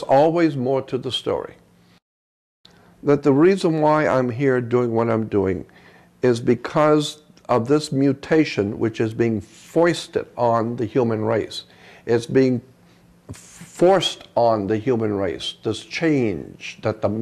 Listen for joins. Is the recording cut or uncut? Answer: cut